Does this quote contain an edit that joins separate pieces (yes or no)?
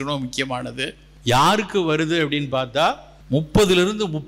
yes